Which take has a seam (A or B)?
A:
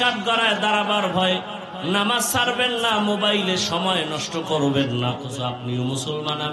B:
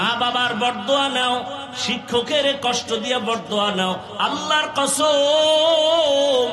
A